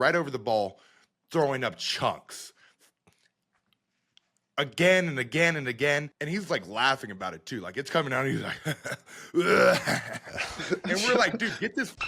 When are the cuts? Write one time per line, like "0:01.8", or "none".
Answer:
0:06.2